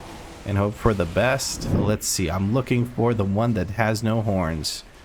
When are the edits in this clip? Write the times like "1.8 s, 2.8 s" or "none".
1.8 s

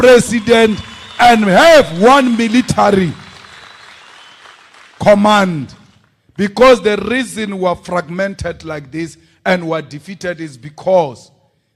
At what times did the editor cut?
none

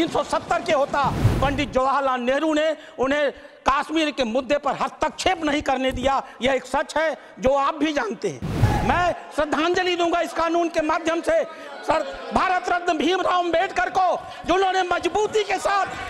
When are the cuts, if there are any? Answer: 1.3 s, 8.6 s

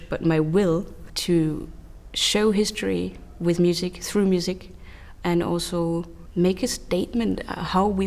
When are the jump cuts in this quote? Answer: 1.1 s, 6.2 s

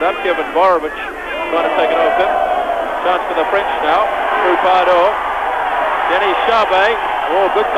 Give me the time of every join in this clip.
2.3 s

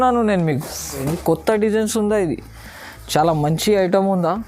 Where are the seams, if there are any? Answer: 1.1 s

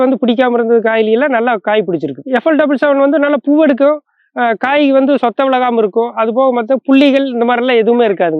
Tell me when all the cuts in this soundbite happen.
2.1 s

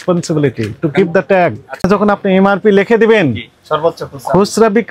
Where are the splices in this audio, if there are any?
1.8 s

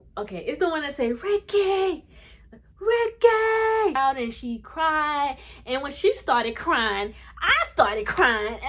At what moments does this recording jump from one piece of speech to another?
3.9 s

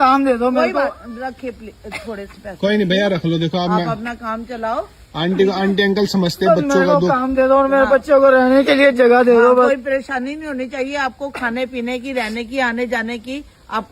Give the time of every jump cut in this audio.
none

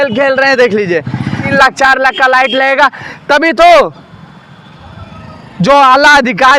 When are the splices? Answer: 1.4 s

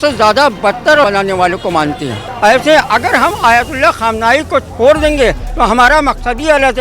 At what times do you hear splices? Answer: 1.0 s, 2.2 s

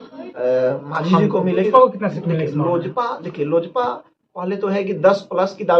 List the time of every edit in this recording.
1.6 s

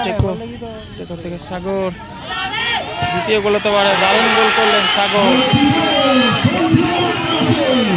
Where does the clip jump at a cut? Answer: none

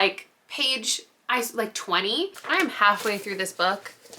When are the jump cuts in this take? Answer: 2.4 s

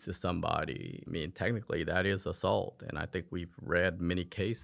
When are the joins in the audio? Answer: 0.9 s

